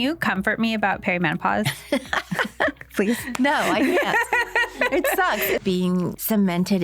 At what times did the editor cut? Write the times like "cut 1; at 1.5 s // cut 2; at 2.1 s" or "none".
cut 1; at 5.6 s